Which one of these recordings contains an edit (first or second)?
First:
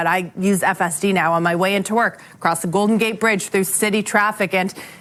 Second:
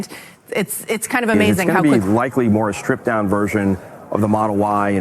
second